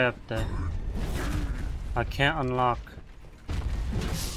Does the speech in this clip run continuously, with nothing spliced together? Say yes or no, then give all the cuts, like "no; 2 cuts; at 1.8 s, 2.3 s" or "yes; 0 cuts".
yes; 0 cuts